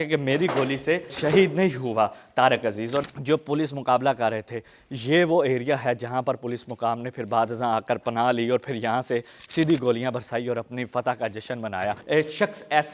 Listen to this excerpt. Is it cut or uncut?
cut